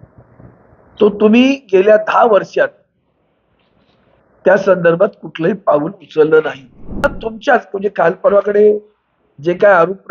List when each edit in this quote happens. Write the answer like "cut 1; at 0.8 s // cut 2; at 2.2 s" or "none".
cut 1; at 7.0 s